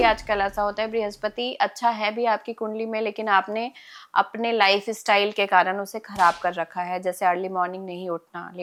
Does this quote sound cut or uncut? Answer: uncut